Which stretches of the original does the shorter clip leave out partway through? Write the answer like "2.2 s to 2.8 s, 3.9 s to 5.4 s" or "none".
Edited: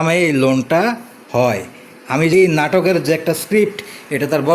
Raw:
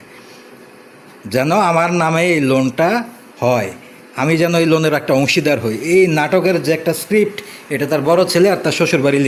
4.4 s to 5.9 s